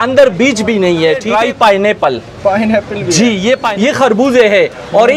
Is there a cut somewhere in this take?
yes; 2 cuts; at 1.3 s, 3.7 s

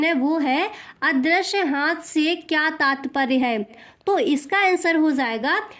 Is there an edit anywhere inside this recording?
yes; 1 cut; at 3.9 s

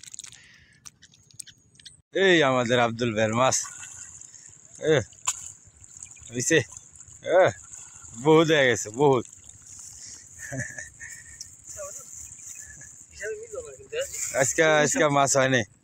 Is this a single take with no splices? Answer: no; 1 cut; at 2.0 s

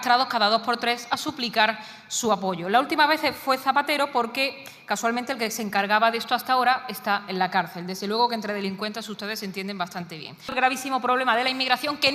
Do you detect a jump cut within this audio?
yes; 1 cut; at 10.5 s

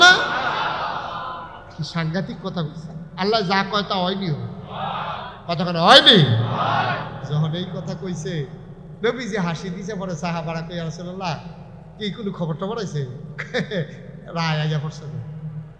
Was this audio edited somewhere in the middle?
yes; 1 cut; at 1.6 s

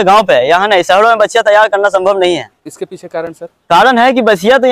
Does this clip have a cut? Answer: no; 0 cuts

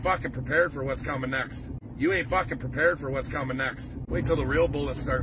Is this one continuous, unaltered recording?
no; 2 cuts; at 1.8 s, 3.9 s

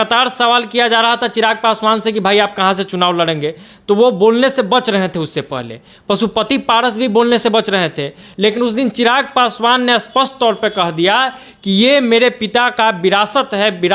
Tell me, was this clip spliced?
no; 0 cuts

